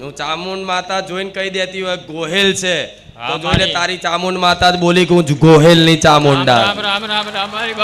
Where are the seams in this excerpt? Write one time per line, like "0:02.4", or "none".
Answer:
none